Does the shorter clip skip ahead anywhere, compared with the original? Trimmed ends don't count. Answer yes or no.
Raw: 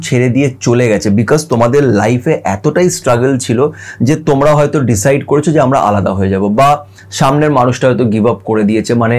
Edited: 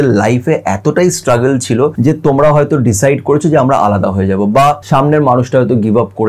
yes